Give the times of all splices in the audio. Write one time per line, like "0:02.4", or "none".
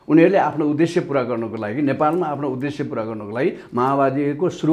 none